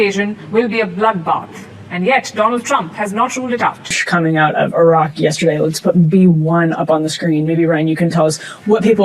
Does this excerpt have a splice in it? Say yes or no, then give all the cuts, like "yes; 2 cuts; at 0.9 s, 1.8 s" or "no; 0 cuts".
yes; 1 cut; at 4.0 s